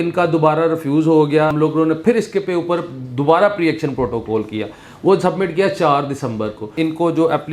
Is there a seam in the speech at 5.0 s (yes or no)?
no